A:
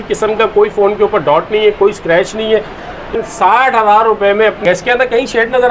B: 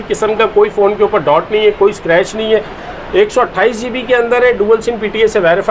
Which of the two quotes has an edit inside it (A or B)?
A